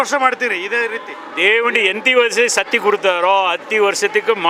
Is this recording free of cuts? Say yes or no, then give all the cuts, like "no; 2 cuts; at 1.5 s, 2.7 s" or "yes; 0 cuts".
yes; 0 cuts